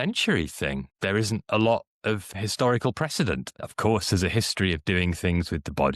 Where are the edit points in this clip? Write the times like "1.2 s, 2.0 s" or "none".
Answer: 0.9 s, 2.3 s, 3.5 s